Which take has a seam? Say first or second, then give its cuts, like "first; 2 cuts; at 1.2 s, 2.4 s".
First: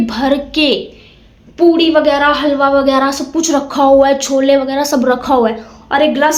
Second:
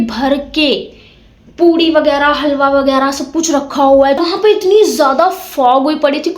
second; 1 cut; at 4.2 s